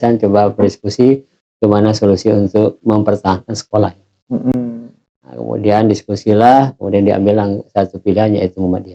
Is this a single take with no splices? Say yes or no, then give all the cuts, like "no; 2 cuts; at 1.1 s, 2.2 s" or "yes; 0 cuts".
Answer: yes; 0 cuts